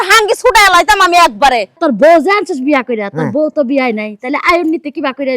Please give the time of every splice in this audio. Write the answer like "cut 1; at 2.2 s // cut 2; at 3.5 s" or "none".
cut 1; at 1.8 s